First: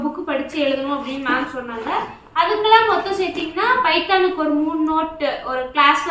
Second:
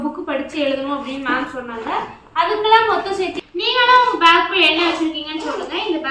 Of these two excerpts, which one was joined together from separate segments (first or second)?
second